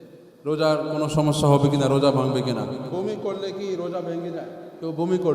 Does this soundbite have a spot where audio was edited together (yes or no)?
yes